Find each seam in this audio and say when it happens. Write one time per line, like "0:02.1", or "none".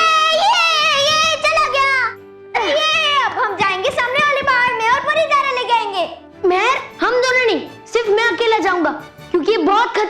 none